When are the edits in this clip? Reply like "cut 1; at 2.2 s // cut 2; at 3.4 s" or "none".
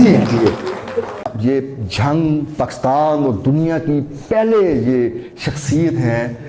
cut 1; at 1.3 s

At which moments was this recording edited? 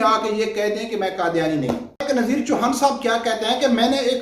cut 1; at 2.1 s

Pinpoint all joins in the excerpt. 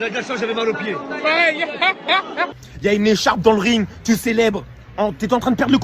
cut 1; at 2.5 s

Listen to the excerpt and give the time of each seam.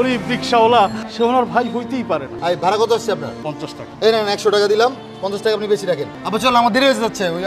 cut 1; at 1.0 s // cut 2; at 2.3 s // cut 3; at 3.8 s // cut 4; at 6.1 s

